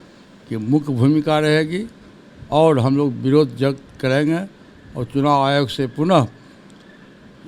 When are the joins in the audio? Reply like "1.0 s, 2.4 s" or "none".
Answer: none